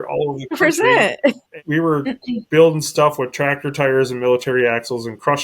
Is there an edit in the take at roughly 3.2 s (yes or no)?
no